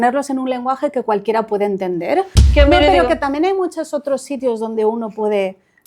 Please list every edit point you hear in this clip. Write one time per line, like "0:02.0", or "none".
0:02.4

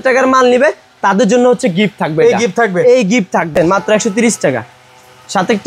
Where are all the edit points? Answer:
0:03.5

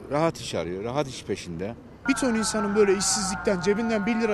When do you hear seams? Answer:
0:01.9

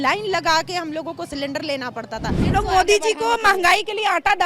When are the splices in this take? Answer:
0:02.4

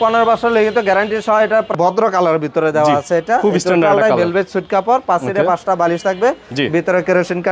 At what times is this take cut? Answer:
0:01.7

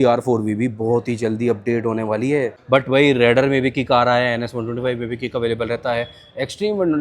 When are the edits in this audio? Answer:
0:02.6

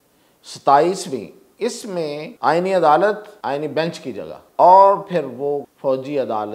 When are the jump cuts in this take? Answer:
0:02.3
0:03.3
0:04.4
0:05.7

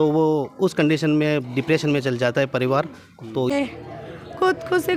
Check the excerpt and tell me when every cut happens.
0:03.5

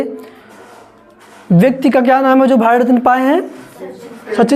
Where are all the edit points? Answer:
none

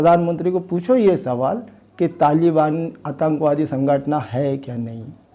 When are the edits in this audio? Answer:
none

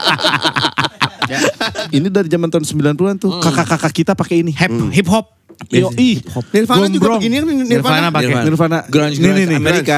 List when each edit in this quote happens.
0:01.7

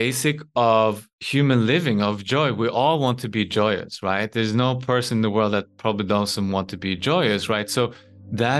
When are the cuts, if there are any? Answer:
none

